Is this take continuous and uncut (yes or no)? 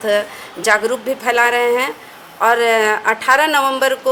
yes